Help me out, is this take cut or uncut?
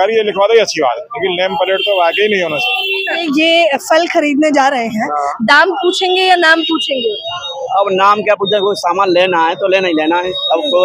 cut